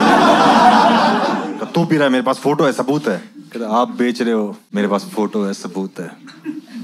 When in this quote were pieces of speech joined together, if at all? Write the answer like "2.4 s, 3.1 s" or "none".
1.5 s, 4.7 s